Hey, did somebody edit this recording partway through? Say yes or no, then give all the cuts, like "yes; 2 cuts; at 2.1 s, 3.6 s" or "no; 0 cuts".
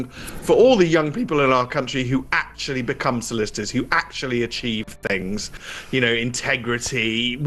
no; 0 cuts